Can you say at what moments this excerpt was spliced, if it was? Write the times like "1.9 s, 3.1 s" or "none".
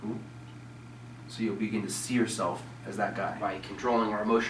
3.4 s